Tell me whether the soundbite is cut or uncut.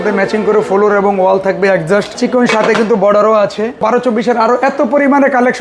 cut